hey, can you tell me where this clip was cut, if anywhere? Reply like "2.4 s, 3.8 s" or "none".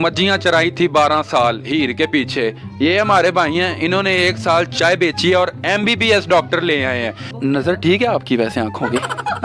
7.2 s